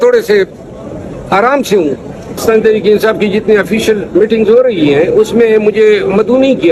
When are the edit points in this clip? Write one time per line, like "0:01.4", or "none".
0:02.4